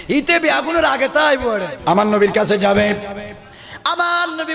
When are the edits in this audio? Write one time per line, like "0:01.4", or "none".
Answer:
0:01.7